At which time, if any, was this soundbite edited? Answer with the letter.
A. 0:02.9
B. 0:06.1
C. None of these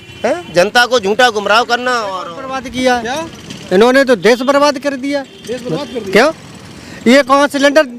C